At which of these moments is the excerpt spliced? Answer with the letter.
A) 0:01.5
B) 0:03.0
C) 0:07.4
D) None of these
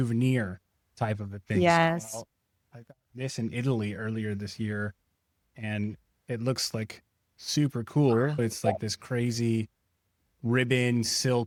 D